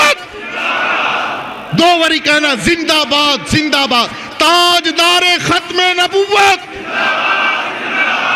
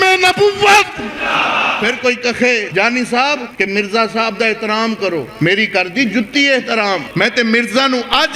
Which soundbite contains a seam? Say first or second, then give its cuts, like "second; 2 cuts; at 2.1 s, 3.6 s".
second; 5 cuts; at 1.7 s, 2.7 s, 3.5 s, 5.3 s, 7.1 s